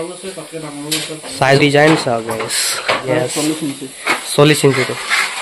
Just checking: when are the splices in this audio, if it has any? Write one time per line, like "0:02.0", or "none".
0:01.6
0:03.0